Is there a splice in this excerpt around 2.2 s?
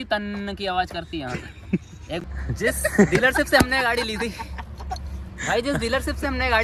yes; 1 cut; at 2.2 s

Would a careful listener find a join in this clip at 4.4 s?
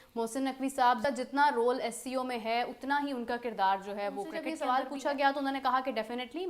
yes; 1 cut; at 4.4 s

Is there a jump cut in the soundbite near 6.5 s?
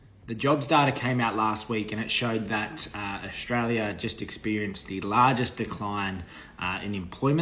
no; 0 cuts

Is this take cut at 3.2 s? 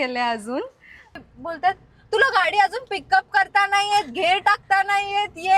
no; 1 cut; at 1.2 s

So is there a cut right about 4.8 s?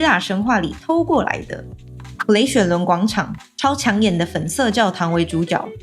no; 2 cuts; at 2.0 s, 3.4 s

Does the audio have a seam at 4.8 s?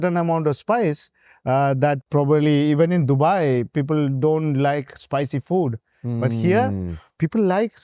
no; 1 cut; at 2.0 s

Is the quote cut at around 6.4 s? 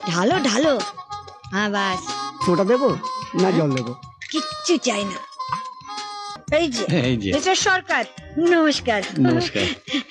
yes; 1 cut; at 6.4 s

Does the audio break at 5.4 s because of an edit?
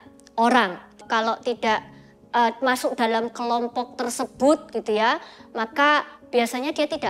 no; 1 cut; at 1.0 s

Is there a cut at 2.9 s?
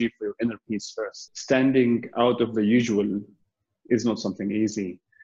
no; 1 cut; at 1.2 s

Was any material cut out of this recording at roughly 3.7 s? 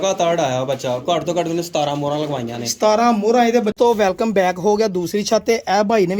yes; 1 cut; at 3.7 s

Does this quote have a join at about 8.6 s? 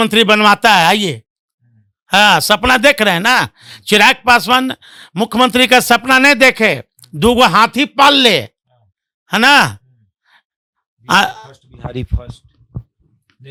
no; 0 cuts

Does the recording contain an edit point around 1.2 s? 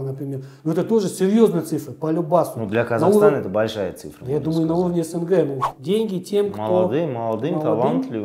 no; 1 cut; at 5.7 s

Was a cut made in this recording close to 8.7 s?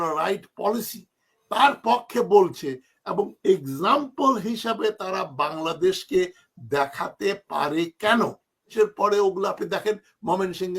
yes; 1 cut; at 8.7 s

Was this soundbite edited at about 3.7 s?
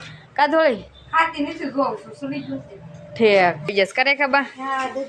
yes; 1 cut; at 3.7 s

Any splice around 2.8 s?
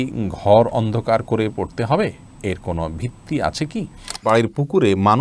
no; 1 cut; at 4.2 s

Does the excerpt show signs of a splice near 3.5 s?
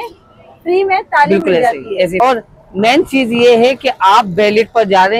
no; 1 cut; at 2.2 s

